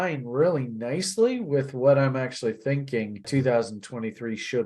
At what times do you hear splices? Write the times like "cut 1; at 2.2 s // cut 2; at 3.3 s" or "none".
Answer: cut 1; at 3.3 s